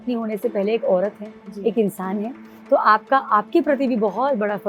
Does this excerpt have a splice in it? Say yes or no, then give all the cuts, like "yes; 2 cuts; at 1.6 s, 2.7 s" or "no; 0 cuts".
no; 0 cuts